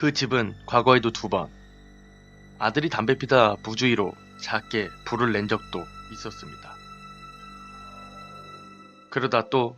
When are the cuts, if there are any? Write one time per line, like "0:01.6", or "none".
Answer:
0:03.7